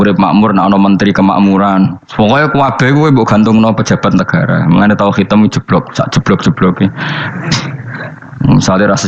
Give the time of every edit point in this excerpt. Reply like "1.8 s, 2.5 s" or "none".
8.2 s